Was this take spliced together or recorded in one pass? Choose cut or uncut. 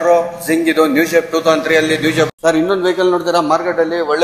cut